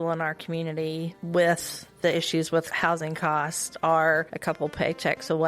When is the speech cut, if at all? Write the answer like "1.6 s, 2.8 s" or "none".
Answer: 1.2 s, 2.7 s, 4.3 s